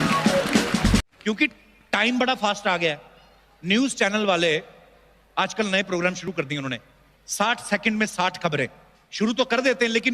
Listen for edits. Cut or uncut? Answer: cut